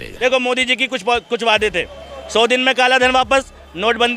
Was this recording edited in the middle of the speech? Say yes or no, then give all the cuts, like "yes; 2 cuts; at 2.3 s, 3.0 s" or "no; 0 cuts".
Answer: no; 0 cuts